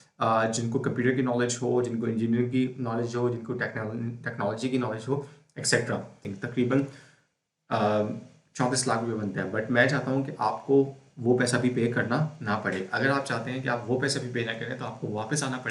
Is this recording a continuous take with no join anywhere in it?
no; 1 cut; at 6.3 s

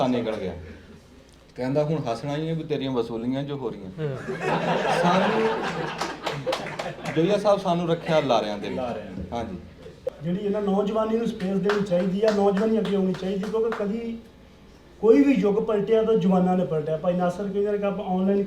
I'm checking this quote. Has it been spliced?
yes; 1 cut; at 10.1 s

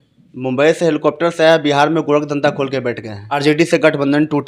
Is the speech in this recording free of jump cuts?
no; 1 cut; at 3.3 s

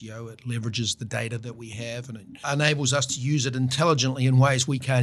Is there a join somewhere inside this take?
yes; 2 cuts; at 2.4 s, 3.7 s

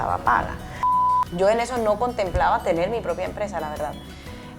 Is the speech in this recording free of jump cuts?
no; 1 cut; at 1.1 s

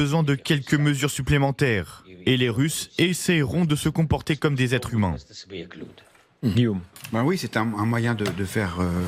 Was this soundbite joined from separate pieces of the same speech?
no; 0 cuts

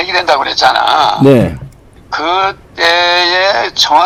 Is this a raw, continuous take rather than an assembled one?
yes; 0 cuts

